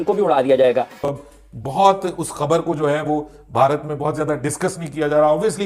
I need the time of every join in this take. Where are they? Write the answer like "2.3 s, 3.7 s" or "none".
1.0 s